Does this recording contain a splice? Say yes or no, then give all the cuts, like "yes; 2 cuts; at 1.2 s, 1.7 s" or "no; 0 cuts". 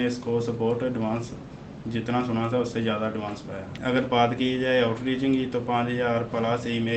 yes; 1 cut; at 3.7 s